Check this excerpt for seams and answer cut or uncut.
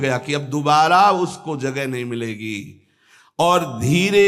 uncut